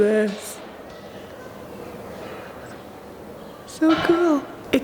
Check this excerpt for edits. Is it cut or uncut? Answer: uncut